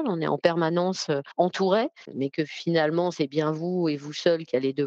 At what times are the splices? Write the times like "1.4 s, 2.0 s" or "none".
1.3 s, 2.1 s